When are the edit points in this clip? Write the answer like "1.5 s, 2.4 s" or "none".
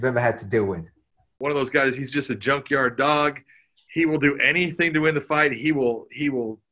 1.2 s